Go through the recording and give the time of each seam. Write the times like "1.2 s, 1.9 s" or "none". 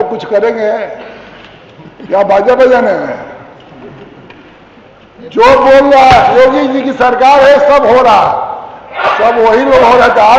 none